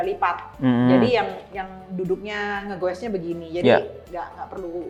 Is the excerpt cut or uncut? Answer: uncut